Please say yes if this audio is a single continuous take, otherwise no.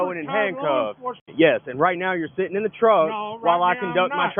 no